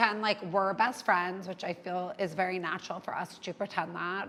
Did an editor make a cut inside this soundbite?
no; 0 cuts

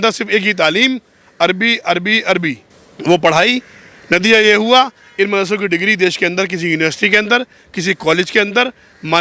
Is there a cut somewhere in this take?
no; 0 cuts

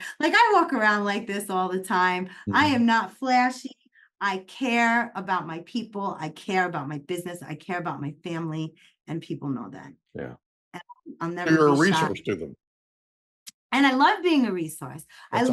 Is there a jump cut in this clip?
no; 0 cuts

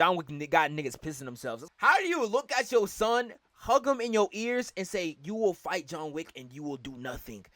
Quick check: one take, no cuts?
no; 1 cut; at 1.5 s

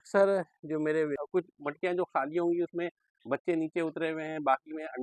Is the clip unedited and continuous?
no; 1 cut; at 1.2 s

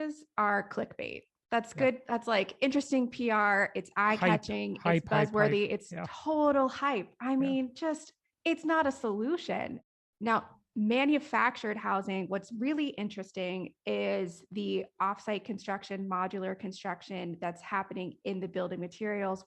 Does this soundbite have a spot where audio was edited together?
yes; 1 cut; at 9.9 s

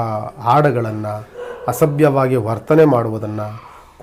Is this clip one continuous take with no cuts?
yes; 0 cuts

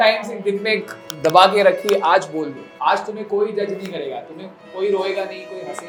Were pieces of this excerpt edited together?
no; 0 cuts

